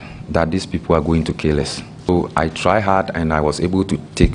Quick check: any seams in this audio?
yes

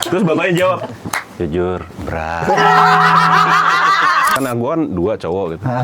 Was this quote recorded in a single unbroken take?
no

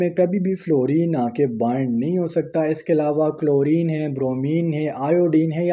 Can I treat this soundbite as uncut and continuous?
yes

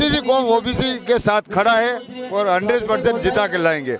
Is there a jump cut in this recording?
no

